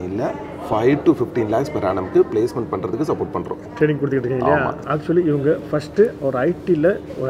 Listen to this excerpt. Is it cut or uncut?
uncut